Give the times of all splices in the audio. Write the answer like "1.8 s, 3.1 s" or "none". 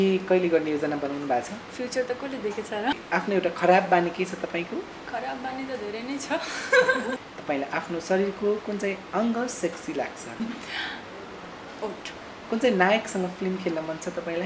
3.0 s, 7.2 s, 10.4 s, 12.3 s